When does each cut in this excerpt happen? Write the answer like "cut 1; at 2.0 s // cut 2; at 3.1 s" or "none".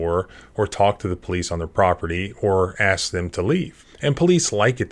cut 1; at 3.8 s